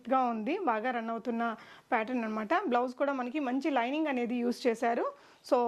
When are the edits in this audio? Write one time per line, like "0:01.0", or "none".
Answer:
none